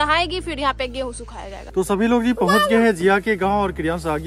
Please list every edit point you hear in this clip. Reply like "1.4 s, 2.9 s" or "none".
1.7 s

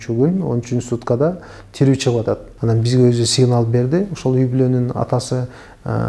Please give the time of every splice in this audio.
2.5 s

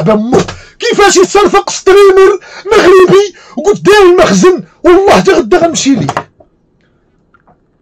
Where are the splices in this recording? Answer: none

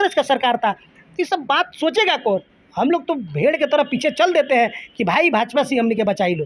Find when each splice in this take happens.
none

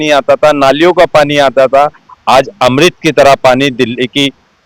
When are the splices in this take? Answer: none

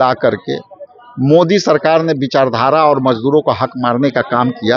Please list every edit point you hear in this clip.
none

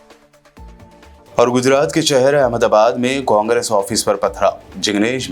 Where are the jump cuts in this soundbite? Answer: 1.2 s

